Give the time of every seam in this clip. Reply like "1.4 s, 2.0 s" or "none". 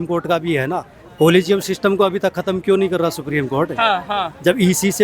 none